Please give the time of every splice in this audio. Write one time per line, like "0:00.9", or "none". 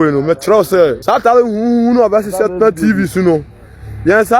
0:01.0